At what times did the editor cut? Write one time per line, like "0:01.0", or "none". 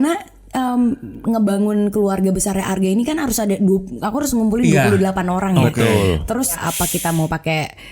0:06.6